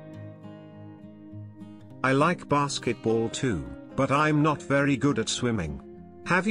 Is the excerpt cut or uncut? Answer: cut